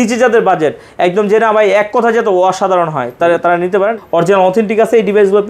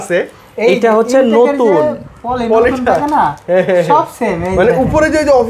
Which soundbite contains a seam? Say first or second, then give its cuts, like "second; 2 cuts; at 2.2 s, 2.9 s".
first; 1 cut; at 4.0 s